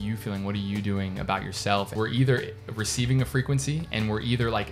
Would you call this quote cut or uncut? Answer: cut